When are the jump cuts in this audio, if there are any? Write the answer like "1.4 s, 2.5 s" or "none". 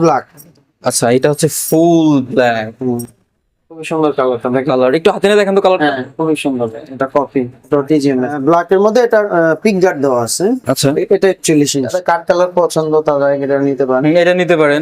3.9 s, 8.4 s, 11.9 s